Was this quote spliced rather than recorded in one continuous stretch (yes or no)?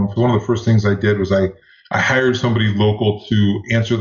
no